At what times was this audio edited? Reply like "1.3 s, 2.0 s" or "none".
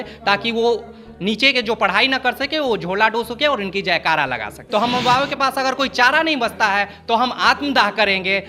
4.6 s

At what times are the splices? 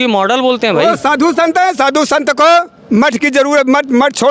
none

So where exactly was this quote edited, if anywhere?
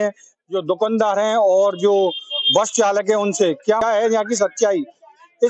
3.8 s

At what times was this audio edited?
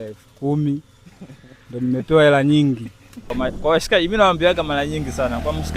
3.3 s

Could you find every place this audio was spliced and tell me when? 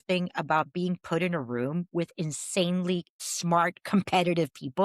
1.9 s

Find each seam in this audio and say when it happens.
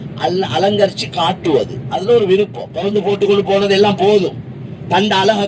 2.6 s

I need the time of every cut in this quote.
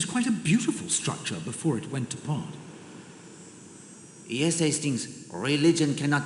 2.5 s, 4.2 s

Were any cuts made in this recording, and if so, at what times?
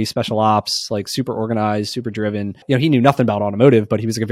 2.6 s

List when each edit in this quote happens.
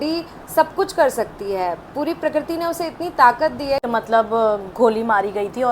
3.8 s

